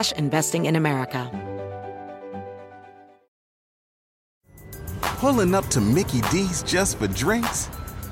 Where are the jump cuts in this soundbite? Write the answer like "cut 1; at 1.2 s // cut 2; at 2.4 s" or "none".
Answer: cut 1; at 1.3 s

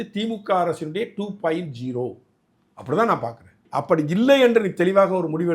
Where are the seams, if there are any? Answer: cut 1; at 3.6 s

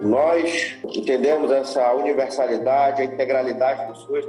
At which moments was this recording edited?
cut 1; at 0.9 s

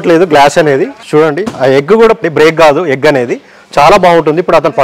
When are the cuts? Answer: cut 1; at 0.9 s // cut 2; at 2.2 s

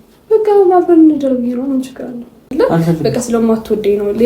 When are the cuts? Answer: cut 1; at 2.5 s

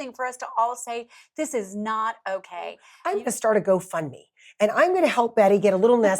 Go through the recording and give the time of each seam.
cut 1; at 2.9 s

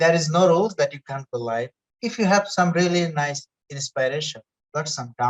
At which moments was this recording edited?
cut 1; at 1.8 s

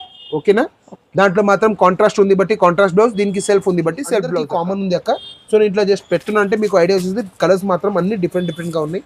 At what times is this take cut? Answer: cut 1; at 4.6 s

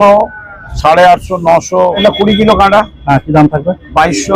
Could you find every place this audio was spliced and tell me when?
cut 1; at 2.0 s

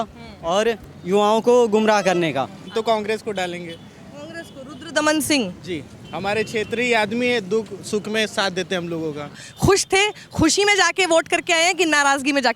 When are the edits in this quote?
cut 1; at 2.6 s // cut 2; at 9.4 s

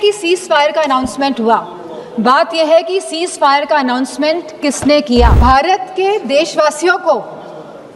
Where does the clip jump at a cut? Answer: cut 1; at 5.4 s

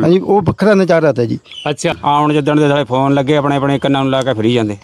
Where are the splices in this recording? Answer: cut 1; at 1.9 s

